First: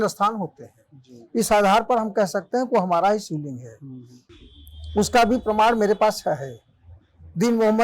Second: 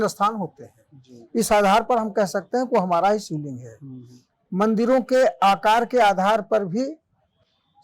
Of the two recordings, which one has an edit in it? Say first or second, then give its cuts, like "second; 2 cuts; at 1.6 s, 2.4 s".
first; 1 cut; at 4.3 s